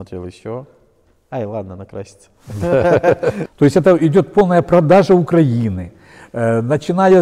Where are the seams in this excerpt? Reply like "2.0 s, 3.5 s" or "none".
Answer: 3.4 s